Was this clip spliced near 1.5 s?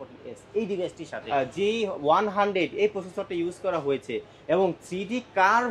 yes; 1 cut; at 1.5 s

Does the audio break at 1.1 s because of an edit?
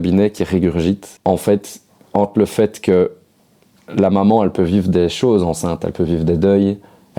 yes; 1 cut; at 1.1 s

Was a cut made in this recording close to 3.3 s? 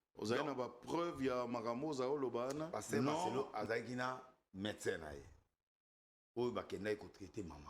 yes; 1 cut; at 3.3 s

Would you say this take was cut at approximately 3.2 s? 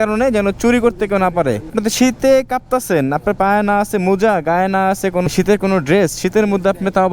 no; 2 cuts; at 1.7 s, 5.3 s

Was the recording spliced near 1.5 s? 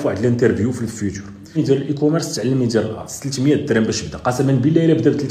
yes; 1 cut; at 1.5 s

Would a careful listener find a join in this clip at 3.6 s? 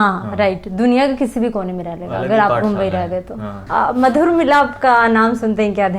yes; 1 cut; at 3.6 s

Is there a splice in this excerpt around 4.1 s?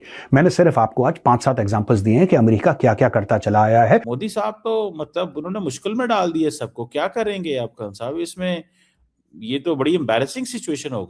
yes; 1 cut; at 4.1 s

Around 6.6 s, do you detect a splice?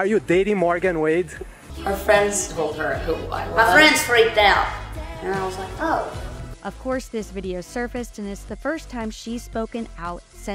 no; 0 cuts

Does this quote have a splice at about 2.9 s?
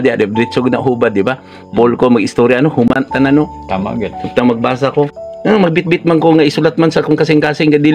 yes; 2 cuts; at 2.9 s, 5.2 s

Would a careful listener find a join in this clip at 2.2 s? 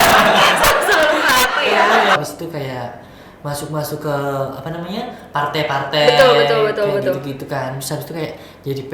yes; 1 cut; at 2.2 s

